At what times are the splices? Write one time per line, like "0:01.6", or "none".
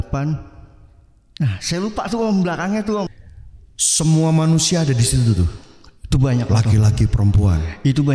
0:03.1